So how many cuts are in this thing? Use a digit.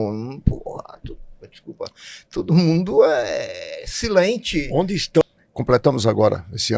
1